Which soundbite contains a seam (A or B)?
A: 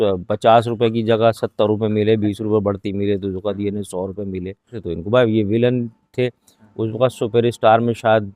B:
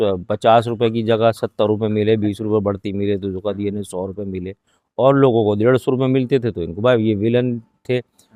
A